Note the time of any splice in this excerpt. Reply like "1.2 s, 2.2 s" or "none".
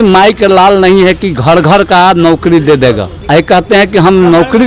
3.1 s